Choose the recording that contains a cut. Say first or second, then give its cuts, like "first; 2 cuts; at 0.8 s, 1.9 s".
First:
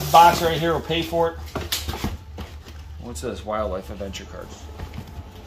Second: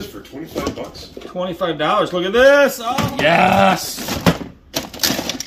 second; 1 cut; at 2.8 s